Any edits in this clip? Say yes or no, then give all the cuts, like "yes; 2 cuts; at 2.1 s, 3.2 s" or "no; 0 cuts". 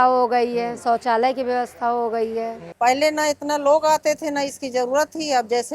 yes; 1 cut; at 2.6 s